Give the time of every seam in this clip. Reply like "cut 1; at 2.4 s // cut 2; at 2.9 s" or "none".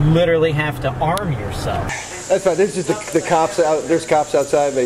cut 1; at 1.9 s

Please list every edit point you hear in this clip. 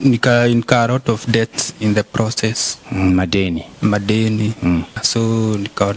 cut 1; at 5.0 s

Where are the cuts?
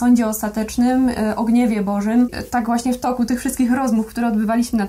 cut 1; at 2.4 s

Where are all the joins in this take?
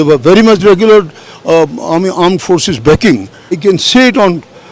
cut 1; at 3.6 s

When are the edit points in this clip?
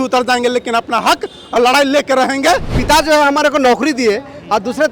cut 1; at 2.8 s

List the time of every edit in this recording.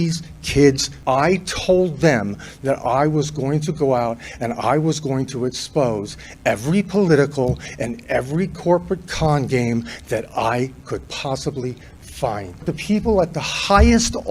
cut 1; at 0.9 s // cut 2; at 12.6 s

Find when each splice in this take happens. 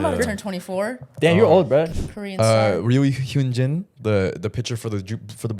cut 1; at 1.9 s

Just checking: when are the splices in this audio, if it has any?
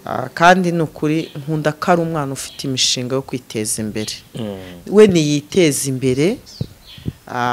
none

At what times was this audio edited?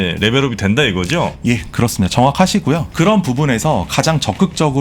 cut 1; at 2.9 s

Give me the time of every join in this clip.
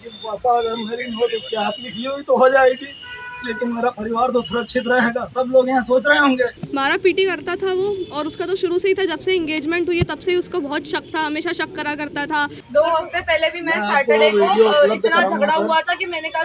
cut 1; at 6.6 s // cut 2; at 12.6 s

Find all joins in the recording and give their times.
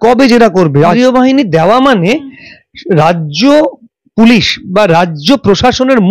cut 1; at 0.9 s

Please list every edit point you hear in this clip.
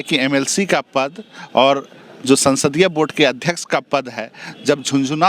none

